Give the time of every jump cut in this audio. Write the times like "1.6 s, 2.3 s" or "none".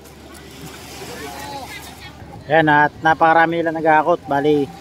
2.2 s